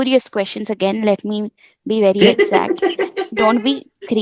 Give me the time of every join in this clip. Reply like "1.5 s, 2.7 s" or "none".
none